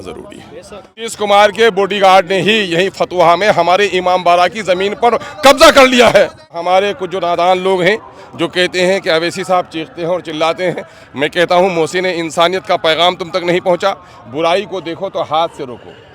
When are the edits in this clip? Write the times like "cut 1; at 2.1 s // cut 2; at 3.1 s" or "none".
cut 1; at 1.0 s // cut 2; at 6.6 s